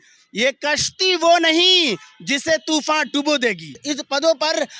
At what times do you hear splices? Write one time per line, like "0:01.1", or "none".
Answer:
0:03.8